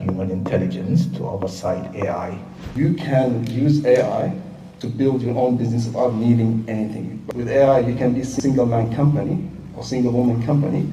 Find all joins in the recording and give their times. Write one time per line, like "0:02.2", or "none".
0:02.6
0:07.2
0:08.3